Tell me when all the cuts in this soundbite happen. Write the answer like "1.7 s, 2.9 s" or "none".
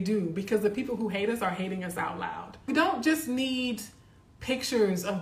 2.6 s